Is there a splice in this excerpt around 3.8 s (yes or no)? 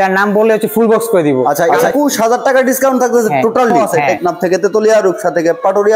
yes